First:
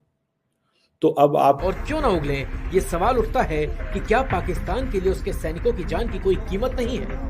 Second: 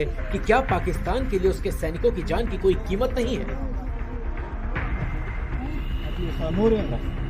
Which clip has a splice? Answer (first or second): first